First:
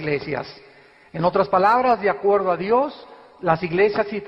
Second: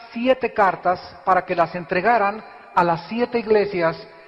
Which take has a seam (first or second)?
first